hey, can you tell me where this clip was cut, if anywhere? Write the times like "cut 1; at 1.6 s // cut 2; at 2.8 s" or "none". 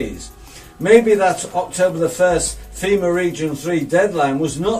none